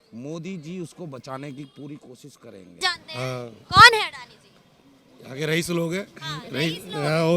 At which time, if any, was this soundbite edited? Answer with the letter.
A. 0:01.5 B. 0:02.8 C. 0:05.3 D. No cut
B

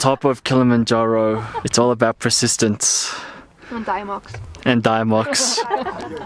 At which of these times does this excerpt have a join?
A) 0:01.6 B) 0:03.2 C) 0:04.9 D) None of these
A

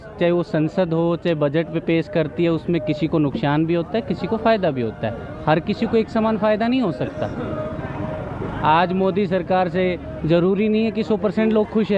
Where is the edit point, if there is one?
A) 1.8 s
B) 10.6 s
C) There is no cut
C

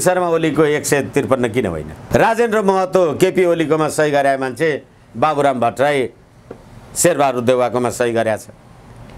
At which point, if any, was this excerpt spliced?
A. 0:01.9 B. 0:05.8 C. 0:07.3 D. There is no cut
A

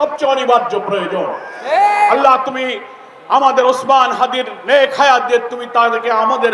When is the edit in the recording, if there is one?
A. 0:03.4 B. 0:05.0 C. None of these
C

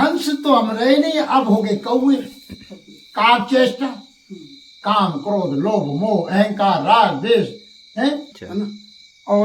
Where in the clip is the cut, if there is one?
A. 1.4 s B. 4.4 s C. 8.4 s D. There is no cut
C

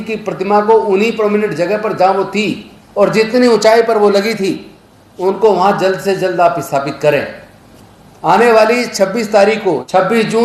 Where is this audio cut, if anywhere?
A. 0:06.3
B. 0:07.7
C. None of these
C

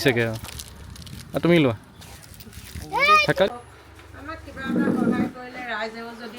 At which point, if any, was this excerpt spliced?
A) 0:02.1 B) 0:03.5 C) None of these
B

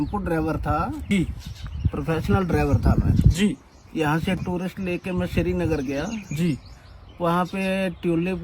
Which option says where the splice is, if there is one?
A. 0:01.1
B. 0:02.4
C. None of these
A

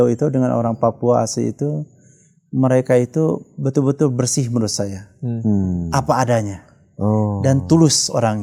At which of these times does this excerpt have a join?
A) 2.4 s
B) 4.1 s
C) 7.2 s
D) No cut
D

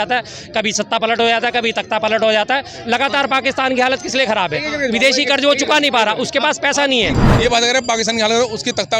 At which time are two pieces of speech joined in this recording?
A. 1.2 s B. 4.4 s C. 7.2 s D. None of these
C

